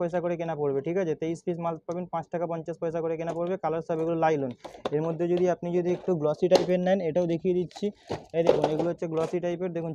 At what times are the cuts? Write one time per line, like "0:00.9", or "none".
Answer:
none